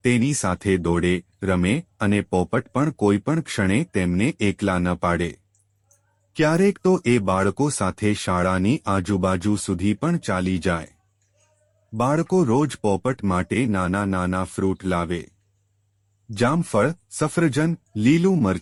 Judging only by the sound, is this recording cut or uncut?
uncut